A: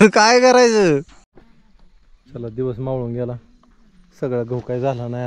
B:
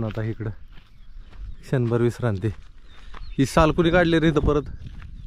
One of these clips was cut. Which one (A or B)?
A